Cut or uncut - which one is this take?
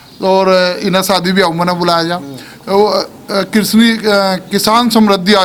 uncut